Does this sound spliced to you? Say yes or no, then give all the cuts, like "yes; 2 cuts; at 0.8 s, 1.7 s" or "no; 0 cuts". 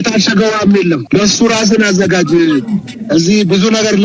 yes; 1 cut; at 1.0 s